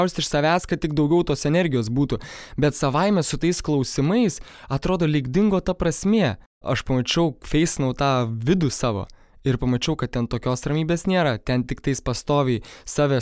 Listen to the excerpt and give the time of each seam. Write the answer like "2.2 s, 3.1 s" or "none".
6.6 s